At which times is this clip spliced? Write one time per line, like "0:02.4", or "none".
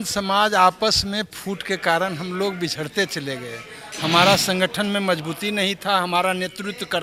none